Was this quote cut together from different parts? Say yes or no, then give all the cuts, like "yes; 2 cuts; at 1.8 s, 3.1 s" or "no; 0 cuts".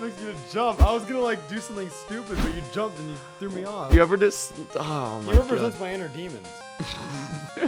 yes; 1 cut; at 3.9 s